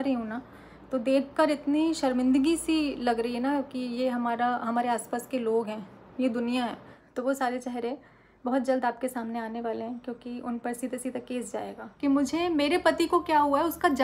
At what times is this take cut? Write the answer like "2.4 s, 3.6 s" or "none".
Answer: 7.0 s, 11.8 s